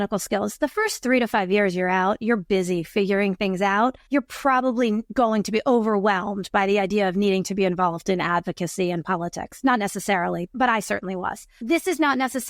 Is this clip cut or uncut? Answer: cut